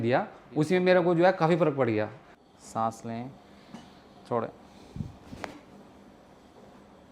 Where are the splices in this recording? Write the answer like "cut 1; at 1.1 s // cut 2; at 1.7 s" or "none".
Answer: cut 1; at 2.2 s